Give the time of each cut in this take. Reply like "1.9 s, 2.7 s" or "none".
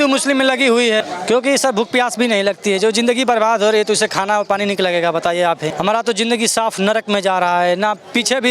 1.0 s, 5.7 s